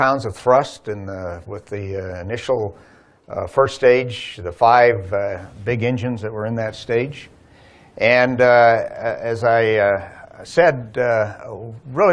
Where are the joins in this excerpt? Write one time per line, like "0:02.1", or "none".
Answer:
none